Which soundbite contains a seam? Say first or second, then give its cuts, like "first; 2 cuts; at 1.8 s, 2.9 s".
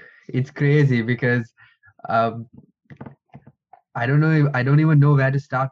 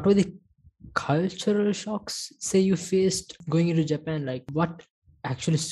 second; 2 cuts; at 3.4 s, 4.5 s